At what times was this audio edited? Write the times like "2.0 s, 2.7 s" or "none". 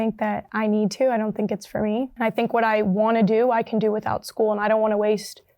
2.1 s